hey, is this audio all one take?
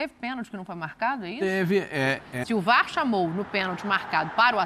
no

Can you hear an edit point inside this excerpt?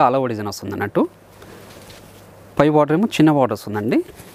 no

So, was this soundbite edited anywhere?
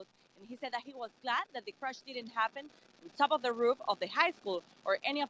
no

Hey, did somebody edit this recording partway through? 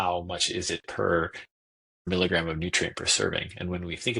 yes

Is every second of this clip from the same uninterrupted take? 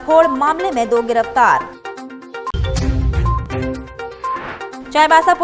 yes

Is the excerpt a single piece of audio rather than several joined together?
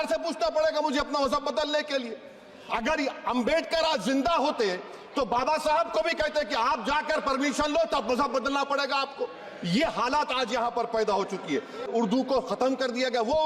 no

